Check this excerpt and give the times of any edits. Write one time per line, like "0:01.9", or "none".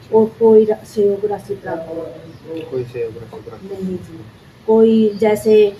none